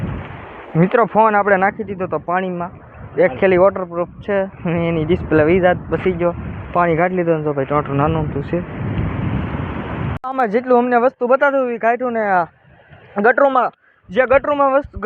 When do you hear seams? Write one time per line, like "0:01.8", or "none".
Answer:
none